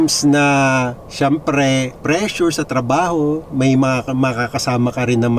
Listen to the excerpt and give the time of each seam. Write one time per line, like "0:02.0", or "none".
none